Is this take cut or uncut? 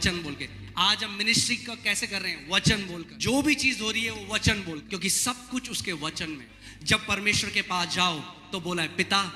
cut